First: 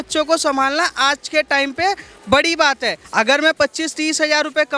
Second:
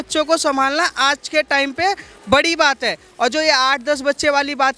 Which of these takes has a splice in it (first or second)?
first